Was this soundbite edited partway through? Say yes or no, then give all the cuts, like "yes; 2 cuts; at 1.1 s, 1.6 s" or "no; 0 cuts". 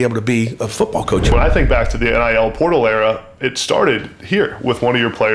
yes; 1 cut; at 1.3 s